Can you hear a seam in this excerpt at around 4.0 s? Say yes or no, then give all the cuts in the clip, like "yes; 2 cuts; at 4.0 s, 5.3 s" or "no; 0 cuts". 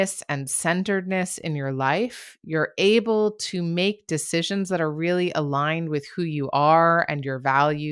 no; 0 cuts